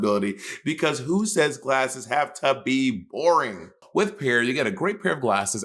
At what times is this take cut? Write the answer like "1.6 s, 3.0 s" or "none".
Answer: 3.8 s

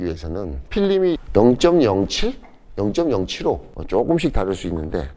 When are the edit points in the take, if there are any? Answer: 3.7 s

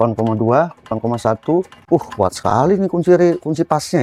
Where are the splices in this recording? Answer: 1.8 s

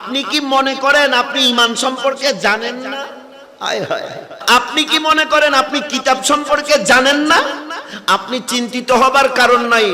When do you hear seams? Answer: 4.3 s

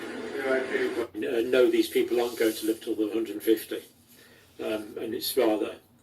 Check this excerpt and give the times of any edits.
1.1 s

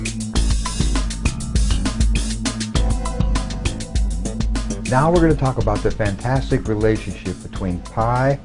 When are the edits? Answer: 1.4 s

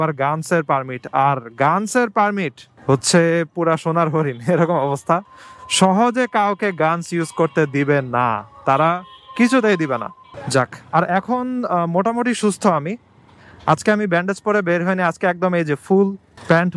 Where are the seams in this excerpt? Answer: 10.2 s

